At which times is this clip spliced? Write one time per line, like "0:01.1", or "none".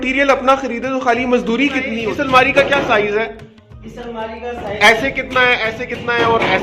0:01.9